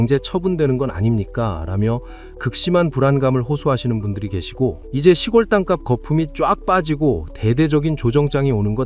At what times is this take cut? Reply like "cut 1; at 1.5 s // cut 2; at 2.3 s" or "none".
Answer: cut 1; at 4.9 s